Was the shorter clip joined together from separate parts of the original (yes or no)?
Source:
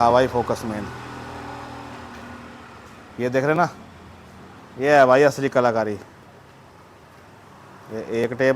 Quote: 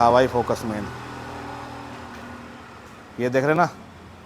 no